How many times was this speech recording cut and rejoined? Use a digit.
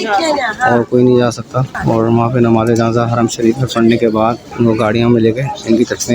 2